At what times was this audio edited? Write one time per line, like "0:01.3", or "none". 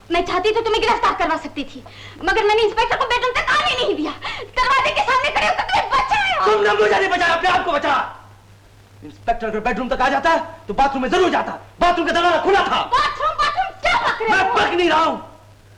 none